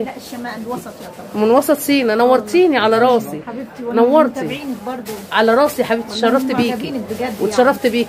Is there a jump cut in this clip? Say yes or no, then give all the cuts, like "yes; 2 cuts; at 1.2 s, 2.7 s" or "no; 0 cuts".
no; 0 cuts